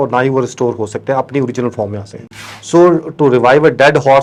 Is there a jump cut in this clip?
no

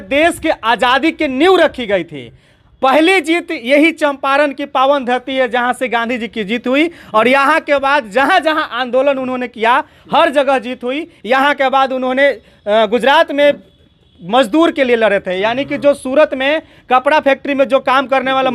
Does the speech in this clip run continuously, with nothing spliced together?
yes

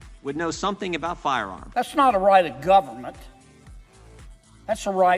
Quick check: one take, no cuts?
no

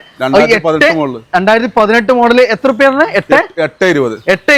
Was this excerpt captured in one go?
yes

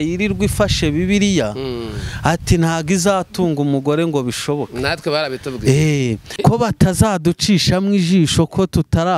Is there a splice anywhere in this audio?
yes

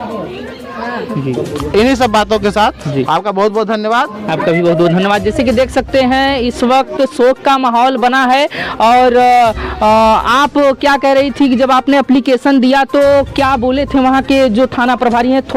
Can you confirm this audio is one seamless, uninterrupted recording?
yes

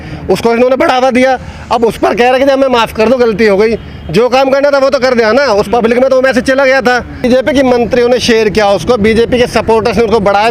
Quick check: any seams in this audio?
yes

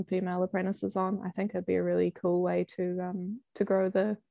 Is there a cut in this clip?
no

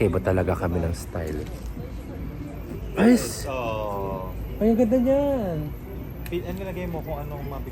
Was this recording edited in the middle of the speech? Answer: no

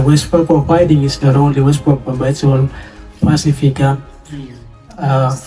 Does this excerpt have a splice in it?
no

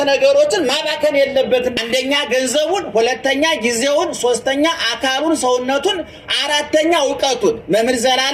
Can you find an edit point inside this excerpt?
yes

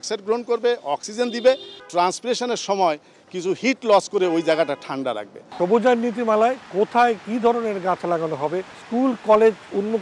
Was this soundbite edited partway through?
yes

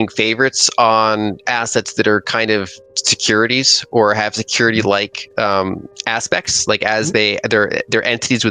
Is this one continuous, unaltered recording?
no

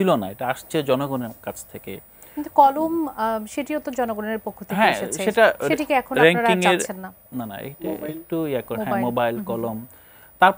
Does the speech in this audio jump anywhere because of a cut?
no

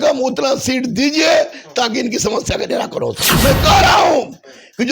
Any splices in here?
yes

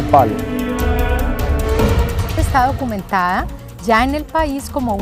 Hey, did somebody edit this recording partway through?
no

